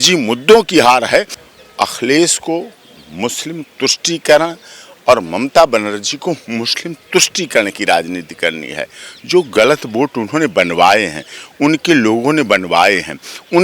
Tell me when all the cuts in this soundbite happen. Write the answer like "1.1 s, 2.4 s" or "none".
1.4 s